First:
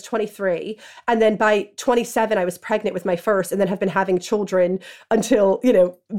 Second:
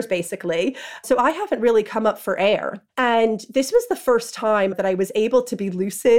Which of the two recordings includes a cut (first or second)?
second